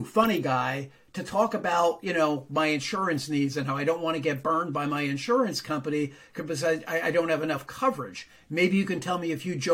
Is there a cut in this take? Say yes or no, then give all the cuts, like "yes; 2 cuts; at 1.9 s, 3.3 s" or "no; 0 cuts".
no; 0 cuts